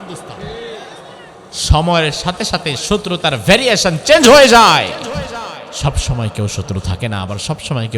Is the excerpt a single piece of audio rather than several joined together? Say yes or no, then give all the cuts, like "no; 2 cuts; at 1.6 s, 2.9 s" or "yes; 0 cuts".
no; 2 cuts; at 1.5 s, 5.7 s